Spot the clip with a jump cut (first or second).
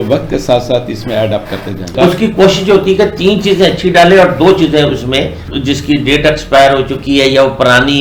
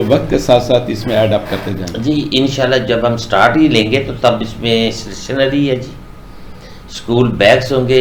first